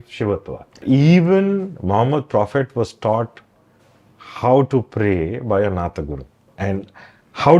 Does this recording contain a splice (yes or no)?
yes